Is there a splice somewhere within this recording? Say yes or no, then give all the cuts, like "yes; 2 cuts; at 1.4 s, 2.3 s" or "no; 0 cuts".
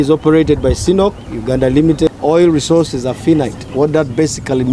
no; 0 cuts